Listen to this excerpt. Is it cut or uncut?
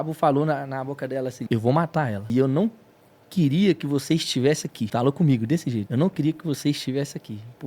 cut